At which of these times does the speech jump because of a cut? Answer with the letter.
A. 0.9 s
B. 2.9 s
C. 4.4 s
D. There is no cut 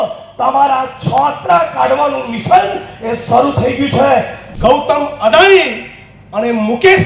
C